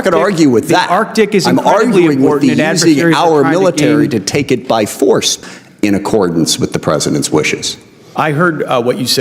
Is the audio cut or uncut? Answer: cut